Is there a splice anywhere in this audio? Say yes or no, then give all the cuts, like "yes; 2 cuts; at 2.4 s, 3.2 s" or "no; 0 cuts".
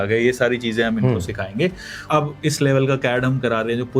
yes; 1 cut; at 2.0 s